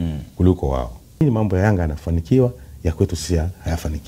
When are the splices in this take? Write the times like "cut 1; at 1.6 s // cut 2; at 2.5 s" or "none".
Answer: cut 1; at 1.2 s